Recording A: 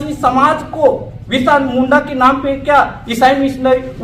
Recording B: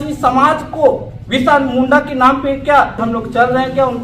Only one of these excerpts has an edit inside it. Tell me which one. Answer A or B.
B